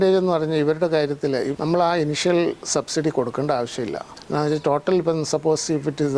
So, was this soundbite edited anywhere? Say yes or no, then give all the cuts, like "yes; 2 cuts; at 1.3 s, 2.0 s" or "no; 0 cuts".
yes; 1 cut; at 1.5 s